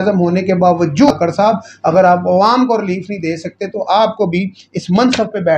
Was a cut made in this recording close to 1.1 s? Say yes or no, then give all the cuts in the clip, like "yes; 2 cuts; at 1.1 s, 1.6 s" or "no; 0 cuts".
yes; 1 cut; at 1.1 s